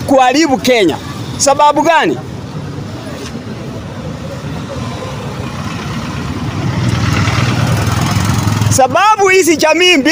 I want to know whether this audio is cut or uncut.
uncut